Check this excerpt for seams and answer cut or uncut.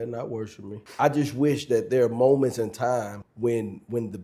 cut